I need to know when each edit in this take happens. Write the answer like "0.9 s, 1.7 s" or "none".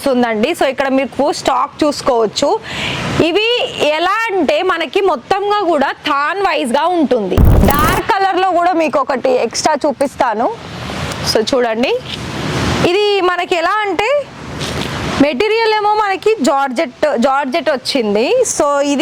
7.6 s